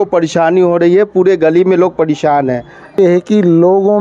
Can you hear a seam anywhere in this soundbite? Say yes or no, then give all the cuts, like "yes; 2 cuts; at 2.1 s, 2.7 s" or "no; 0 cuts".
yes; 1 cut; at 3.0 s